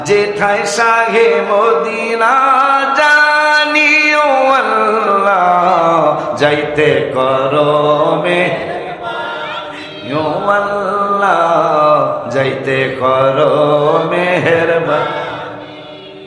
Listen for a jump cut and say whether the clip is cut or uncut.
uncut